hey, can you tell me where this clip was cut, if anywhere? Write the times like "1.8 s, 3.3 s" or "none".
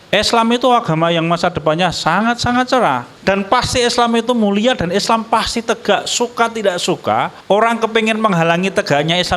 3.1 s, 7.4 s